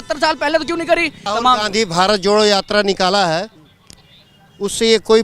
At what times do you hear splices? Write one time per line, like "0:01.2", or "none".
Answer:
0:01.3

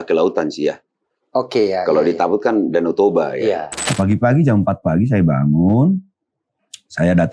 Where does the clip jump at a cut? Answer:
0:03.8

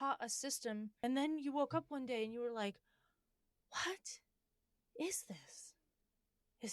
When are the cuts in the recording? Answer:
0:01.0

